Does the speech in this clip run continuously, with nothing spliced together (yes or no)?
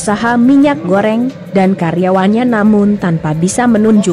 no